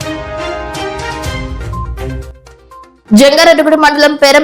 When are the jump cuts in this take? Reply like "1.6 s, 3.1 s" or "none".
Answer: 1.1 s